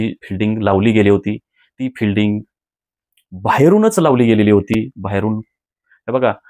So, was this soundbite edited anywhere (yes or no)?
no